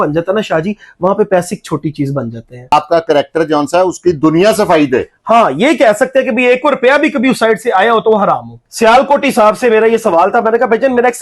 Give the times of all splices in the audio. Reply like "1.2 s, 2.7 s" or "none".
2.7 s, 8.6 s